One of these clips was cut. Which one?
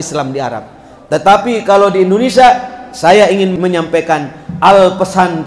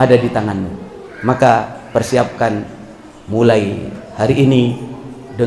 first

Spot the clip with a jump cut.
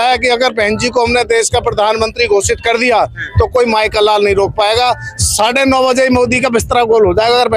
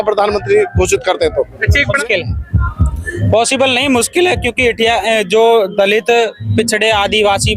second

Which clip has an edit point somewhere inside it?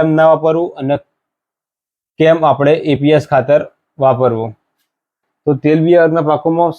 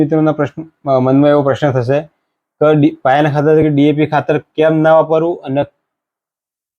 first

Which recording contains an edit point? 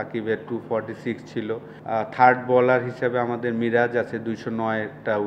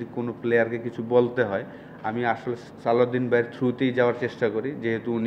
first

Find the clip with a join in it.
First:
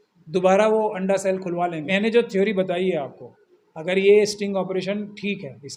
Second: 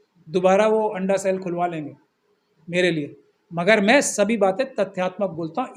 first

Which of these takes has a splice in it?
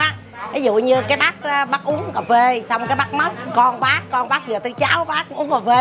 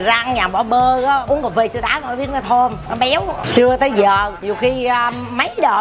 second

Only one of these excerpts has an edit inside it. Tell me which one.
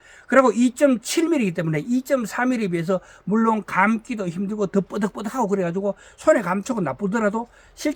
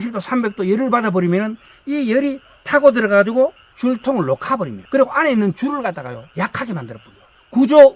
second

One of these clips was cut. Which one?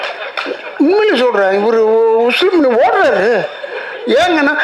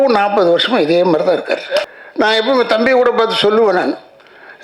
second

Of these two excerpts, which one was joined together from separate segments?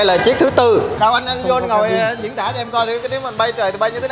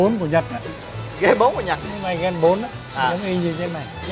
first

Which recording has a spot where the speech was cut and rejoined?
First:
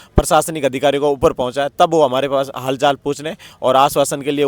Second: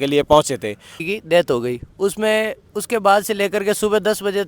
second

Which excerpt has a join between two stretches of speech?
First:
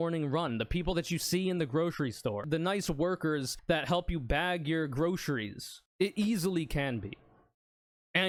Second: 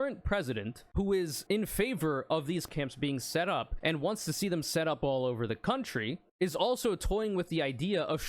second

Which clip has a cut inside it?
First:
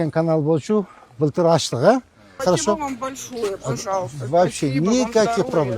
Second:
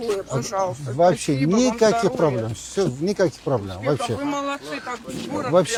first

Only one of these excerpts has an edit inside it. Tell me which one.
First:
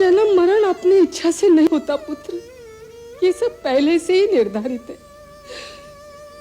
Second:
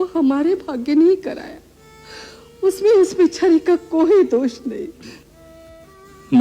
first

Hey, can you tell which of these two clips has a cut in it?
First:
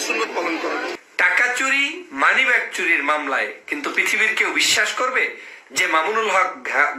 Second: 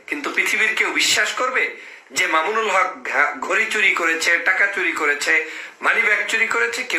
first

